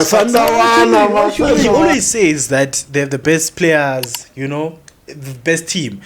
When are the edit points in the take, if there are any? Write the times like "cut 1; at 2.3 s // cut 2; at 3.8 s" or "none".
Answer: cut 1; at 1.7 s